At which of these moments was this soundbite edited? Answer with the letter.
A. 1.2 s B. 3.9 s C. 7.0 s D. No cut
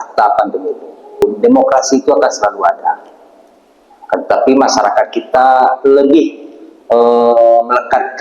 A